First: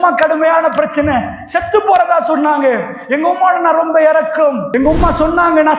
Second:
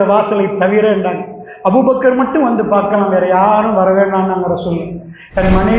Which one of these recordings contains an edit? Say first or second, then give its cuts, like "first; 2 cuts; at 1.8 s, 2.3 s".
first; 1 cut; at 4.6 s